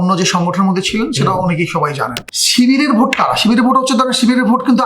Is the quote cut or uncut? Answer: cut